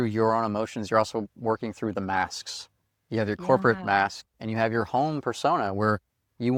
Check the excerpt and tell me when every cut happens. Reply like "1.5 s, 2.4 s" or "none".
none